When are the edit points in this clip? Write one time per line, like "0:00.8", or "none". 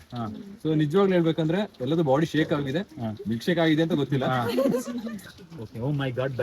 0:05.1